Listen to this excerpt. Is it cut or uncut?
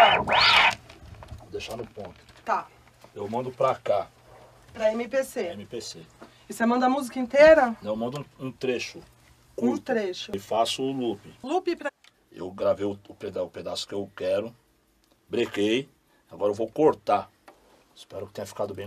uncut